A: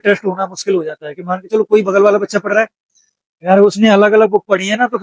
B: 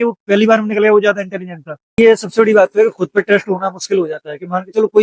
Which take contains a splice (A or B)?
B